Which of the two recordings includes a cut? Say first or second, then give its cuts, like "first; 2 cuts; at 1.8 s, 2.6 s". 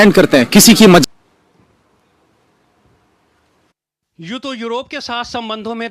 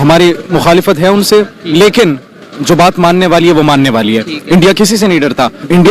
first; 1 cut; at 1.0 s